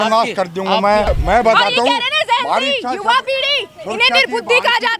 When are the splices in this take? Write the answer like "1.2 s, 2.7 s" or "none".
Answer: 1.1 s